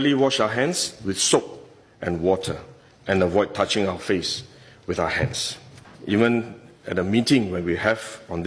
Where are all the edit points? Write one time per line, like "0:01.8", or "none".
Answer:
0:05.9